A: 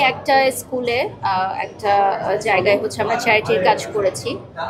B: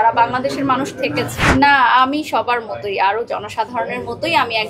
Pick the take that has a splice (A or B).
B